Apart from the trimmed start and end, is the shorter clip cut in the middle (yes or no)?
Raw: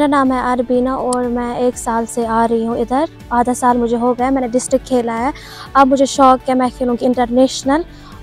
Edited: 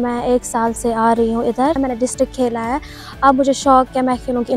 yes